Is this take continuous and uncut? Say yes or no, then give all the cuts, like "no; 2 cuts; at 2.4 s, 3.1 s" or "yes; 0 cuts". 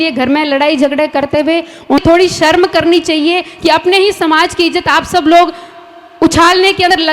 no; 1 cut; at 2.0 s